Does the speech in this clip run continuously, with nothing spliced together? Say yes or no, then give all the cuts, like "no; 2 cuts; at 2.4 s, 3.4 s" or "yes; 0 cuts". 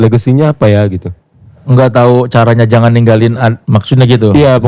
yes; 0 cuts